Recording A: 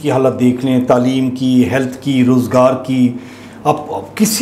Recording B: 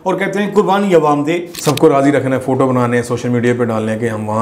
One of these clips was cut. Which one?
B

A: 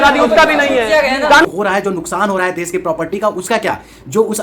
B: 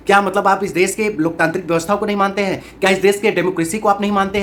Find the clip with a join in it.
A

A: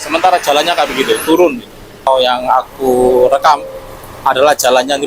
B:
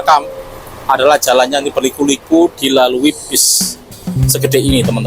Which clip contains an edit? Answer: A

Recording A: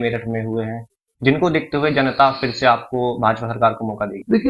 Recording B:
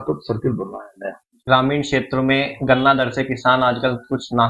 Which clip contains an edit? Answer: B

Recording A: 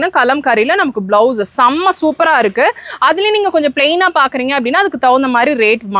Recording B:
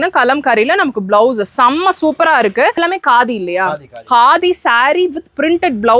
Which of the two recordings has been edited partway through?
B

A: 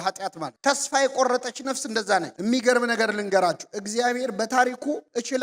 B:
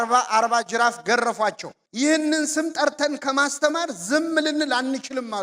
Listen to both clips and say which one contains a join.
A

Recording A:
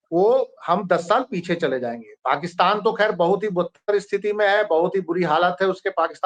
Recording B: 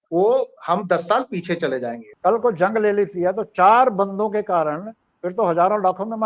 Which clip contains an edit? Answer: B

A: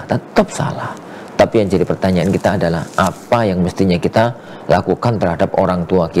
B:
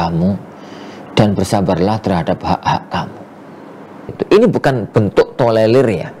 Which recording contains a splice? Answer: B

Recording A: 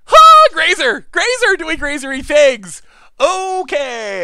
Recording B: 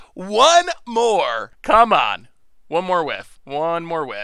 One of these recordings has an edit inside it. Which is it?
B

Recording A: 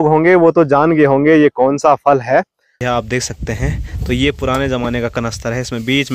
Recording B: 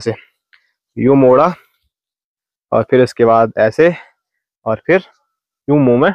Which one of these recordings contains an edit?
A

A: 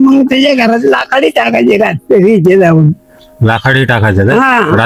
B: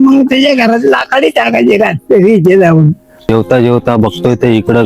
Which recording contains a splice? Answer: B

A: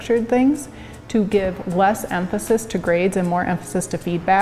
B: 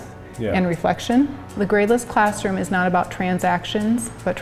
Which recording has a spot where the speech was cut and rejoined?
B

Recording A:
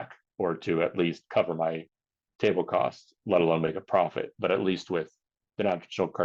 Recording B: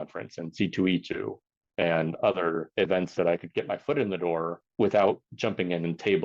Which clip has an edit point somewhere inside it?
B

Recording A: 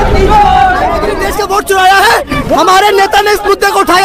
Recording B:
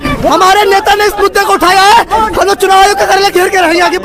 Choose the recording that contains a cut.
A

